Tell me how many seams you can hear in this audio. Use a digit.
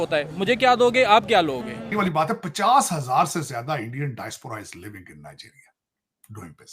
1